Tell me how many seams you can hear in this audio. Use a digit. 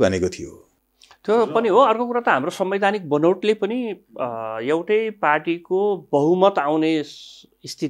0